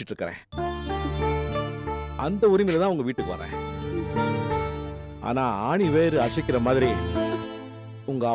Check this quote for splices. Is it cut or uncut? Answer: uncut